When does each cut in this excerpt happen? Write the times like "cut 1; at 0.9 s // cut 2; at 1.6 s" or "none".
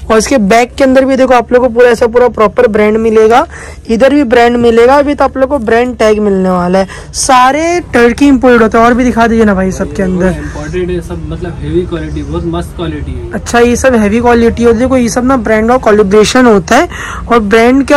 none